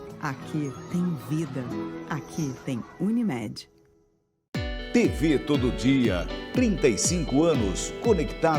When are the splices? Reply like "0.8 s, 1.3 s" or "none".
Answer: 4.4 s